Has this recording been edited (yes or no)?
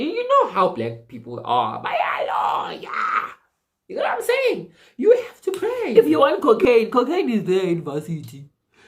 yes